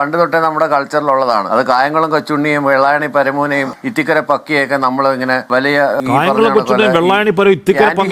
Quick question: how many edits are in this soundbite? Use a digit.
1